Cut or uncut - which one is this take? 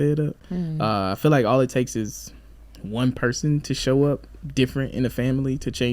uncut